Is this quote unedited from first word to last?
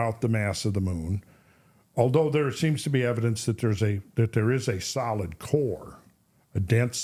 yes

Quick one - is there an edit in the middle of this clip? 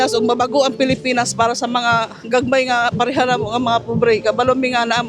no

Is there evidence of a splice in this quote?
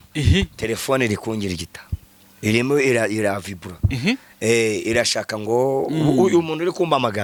no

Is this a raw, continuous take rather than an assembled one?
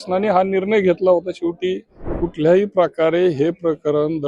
no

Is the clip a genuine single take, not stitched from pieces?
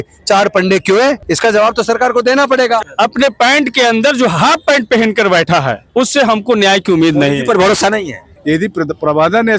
no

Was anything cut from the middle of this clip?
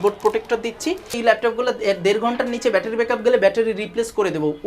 yes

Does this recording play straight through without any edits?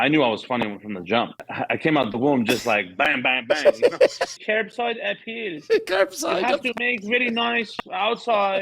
no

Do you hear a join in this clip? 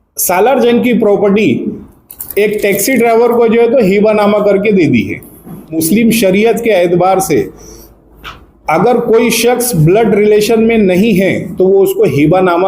yes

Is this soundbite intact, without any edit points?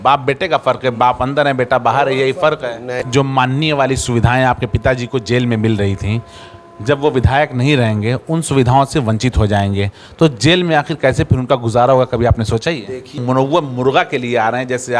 no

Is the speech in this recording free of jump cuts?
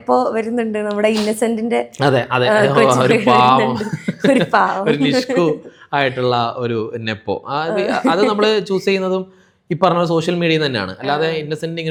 yes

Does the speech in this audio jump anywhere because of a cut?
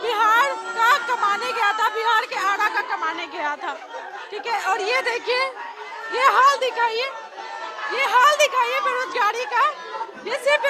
no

